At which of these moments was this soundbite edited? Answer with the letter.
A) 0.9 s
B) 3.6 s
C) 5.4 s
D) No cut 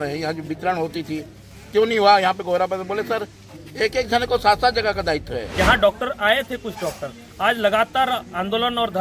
C